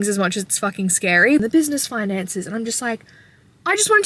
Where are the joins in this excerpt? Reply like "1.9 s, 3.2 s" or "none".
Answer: 1.4 s